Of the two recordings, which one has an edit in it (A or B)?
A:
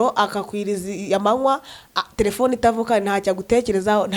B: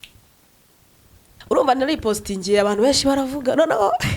B